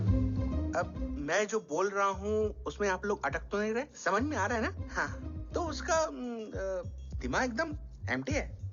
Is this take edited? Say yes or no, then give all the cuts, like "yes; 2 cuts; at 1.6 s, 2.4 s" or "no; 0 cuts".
no; 0 cuts